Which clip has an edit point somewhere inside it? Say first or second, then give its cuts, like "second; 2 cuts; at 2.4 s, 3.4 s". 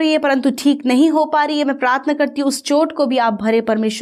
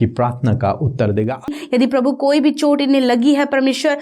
second; 1 cut; at 1.6 s